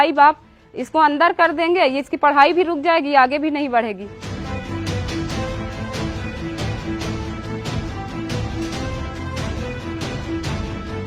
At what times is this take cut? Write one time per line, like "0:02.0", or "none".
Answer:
0:04.2